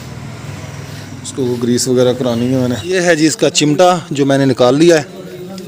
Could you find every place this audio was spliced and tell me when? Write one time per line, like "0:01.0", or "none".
0:02.8